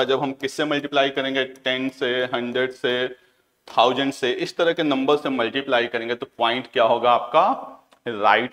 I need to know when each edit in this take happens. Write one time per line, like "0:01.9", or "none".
none